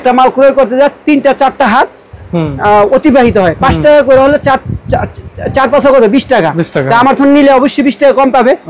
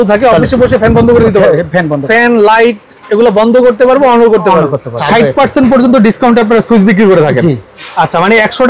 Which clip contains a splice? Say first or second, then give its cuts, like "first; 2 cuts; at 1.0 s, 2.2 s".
second; 2 cuts; at 2.0 s, 4.9 s